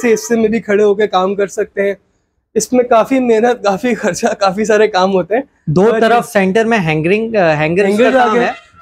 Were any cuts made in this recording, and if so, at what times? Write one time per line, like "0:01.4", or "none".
none